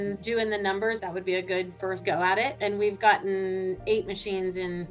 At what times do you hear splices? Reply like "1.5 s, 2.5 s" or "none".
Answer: none